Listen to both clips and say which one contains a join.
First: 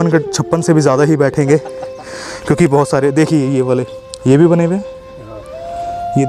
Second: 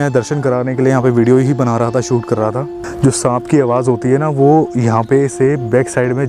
second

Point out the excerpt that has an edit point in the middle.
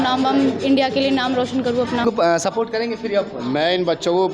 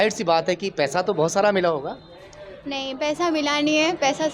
first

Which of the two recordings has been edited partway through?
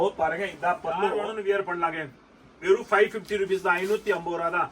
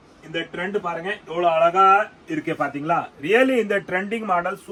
first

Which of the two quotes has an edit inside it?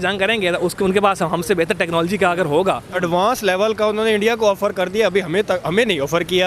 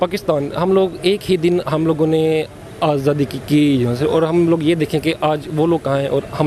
first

